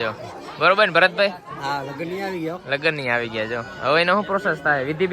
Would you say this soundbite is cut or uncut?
uncut